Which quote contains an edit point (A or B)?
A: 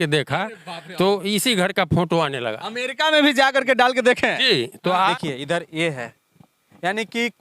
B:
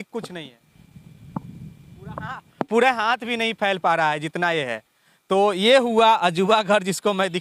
A